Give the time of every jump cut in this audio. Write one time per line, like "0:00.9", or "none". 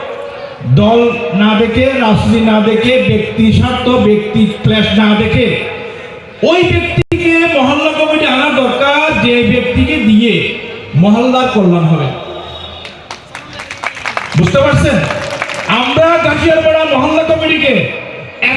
none